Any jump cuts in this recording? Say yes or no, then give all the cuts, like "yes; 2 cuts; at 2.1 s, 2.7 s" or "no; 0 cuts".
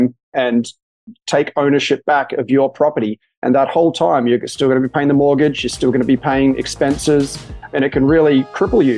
yes; 1 cut; at 7.7 s